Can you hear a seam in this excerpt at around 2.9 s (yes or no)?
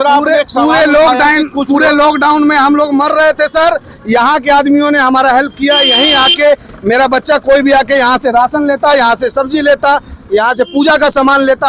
no